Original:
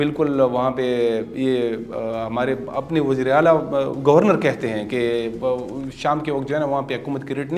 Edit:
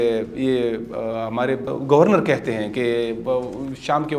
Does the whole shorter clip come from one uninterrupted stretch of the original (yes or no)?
no